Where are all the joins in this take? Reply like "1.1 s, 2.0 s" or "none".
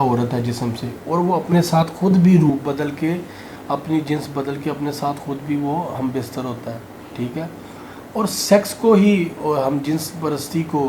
none